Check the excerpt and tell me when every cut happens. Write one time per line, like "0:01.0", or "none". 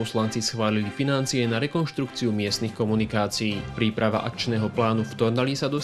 none